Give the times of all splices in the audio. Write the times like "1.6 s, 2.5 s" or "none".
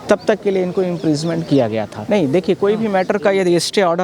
2.0 s